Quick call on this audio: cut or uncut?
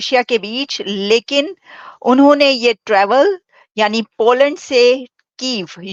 uncut